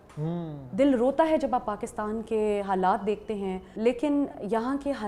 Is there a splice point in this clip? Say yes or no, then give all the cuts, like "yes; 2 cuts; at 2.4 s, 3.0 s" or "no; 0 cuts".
yes; 1 cut; at 3.7 s